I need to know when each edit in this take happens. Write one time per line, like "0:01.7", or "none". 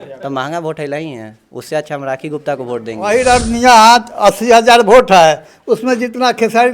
0:02.9